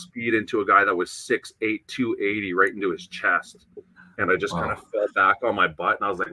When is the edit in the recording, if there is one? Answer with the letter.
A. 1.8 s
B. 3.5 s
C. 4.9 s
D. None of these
D